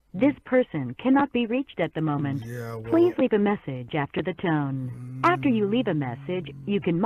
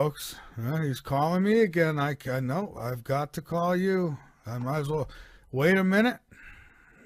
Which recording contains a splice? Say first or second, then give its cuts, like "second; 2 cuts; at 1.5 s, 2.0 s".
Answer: second; 1 cut; at 1.3 s